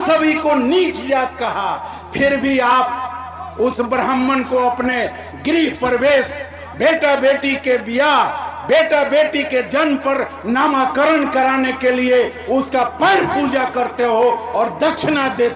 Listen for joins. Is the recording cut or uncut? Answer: uncut